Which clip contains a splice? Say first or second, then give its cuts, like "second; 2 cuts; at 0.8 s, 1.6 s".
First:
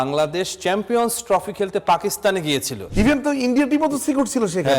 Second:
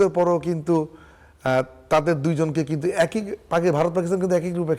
first; 1 cut; at 2.8 s